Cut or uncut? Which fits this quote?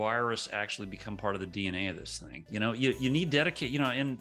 cut